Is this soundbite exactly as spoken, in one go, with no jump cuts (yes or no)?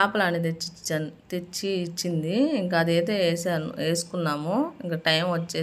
yes